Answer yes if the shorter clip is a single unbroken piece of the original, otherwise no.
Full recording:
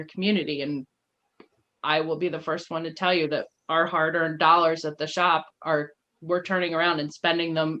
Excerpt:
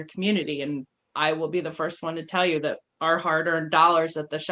no